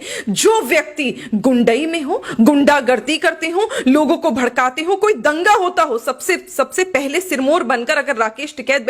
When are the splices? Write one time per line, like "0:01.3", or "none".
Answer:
none

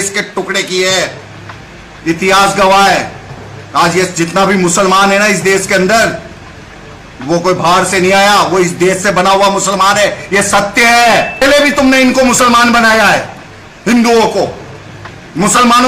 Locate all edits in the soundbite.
0:11.4

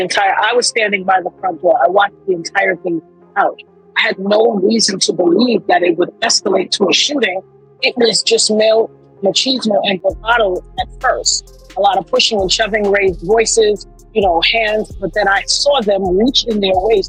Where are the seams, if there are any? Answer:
none

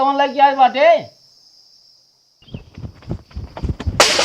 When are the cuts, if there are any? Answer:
0:02.4

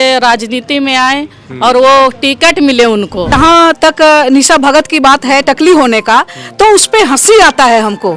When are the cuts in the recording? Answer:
0:03.3

